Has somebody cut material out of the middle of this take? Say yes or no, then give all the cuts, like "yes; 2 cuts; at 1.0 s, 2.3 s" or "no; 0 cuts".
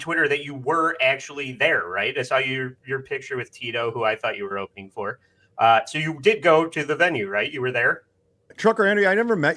no; 0 cuts